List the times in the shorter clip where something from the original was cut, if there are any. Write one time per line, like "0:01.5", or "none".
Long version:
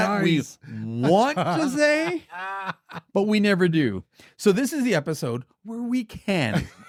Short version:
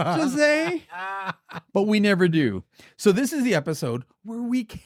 none